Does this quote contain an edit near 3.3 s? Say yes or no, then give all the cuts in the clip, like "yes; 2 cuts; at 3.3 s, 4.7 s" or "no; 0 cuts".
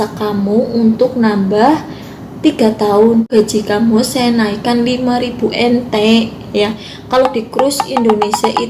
yes; 1 cut; at 3.3 s